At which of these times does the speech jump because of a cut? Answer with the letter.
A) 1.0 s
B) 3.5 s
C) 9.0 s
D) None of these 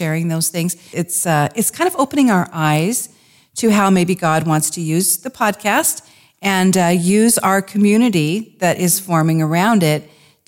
A